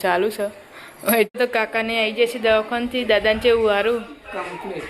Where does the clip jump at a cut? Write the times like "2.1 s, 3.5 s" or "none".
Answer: 1.3 s

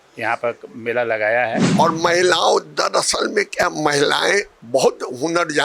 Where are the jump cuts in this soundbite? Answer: 1.7 s

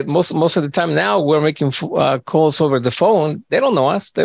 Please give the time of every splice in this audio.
none

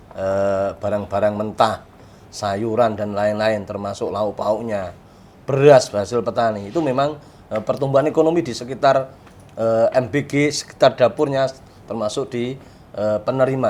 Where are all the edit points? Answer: none

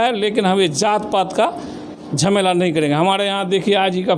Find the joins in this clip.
none

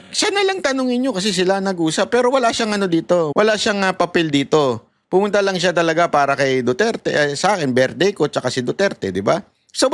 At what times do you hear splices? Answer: 3.3 s

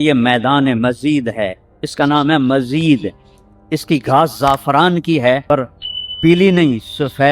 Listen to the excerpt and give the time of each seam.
5.7 s

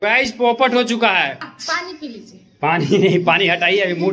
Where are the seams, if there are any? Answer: 1.4 s

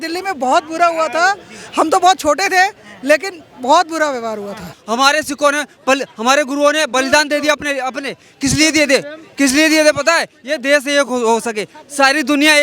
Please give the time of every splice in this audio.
4.7 s

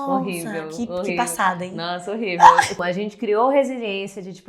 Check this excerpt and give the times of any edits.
2.8 s

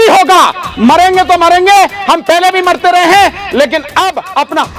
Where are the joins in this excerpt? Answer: none

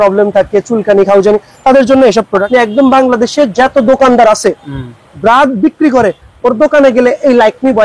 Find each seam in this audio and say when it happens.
2.5 s

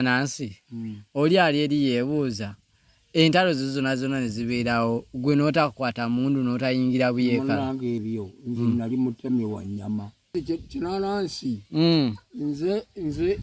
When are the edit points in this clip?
10.3 s

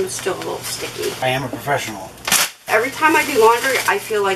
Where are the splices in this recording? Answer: 1.2 s, 2.7 s

